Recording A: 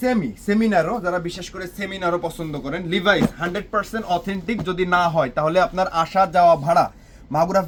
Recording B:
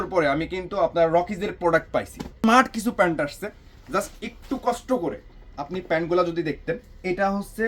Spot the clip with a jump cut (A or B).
B